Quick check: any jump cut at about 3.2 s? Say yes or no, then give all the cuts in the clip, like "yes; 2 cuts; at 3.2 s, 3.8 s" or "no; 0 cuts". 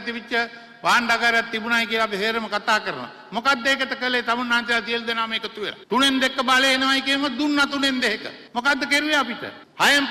no; 1 cut; at 5.8 s